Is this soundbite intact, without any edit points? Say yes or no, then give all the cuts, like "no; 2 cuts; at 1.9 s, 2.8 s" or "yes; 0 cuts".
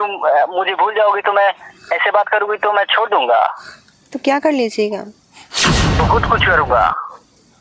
yes; 0 cuts